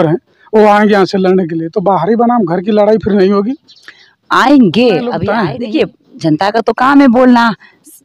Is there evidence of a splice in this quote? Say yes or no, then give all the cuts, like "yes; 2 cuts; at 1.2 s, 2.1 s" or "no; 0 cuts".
yes; 1 cut; at 5.2 s